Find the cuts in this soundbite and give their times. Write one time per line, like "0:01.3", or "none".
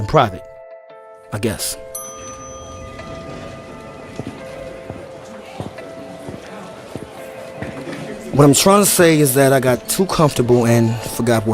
0:10.1